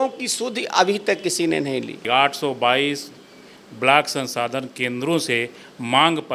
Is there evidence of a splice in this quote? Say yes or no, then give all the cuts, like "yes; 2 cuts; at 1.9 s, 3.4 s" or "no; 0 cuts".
yes; 1 cut; at 2.0 s